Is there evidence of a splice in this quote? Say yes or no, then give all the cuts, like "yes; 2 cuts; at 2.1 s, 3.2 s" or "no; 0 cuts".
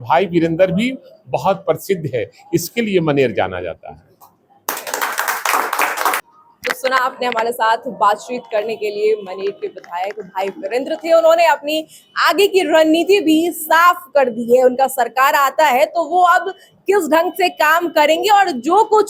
no; 0 cuts